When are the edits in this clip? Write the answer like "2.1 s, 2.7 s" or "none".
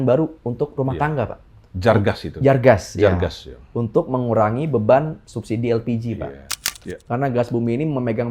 6.8 s

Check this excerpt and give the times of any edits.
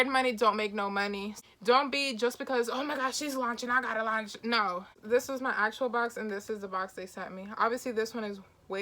1.3 s, 5.0 s

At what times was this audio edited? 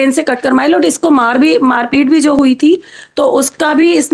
none

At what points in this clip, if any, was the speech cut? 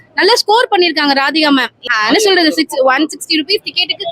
1.8 s

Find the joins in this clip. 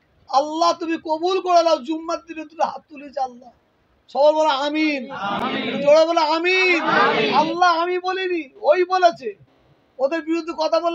none

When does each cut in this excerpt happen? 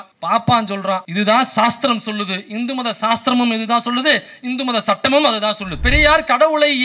1.1 s, 5.7 s

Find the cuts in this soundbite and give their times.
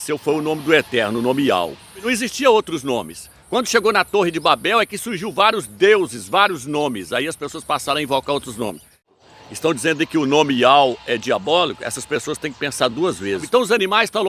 2.1 s, 9.1 s, 13.5 s

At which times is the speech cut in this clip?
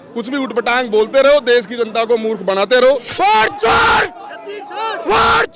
3.1 s

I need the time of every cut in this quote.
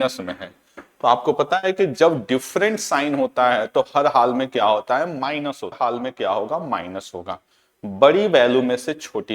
5.8 s

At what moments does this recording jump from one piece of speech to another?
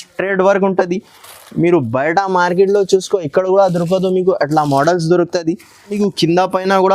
5.9 s

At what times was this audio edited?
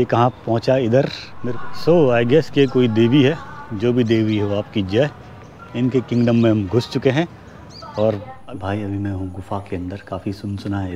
1.3 s, 8.3 s

